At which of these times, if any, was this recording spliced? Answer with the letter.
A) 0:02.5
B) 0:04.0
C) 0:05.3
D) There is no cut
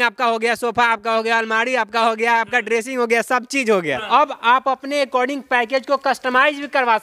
B